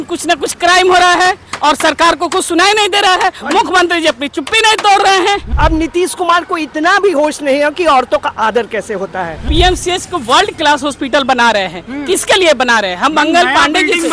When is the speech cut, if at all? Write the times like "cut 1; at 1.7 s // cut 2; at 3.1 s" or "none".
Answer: cut 1; at 5.5 s // cut 2; at 9.4 s